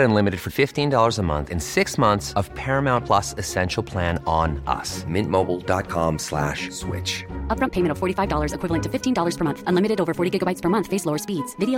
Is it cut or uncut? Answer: uncut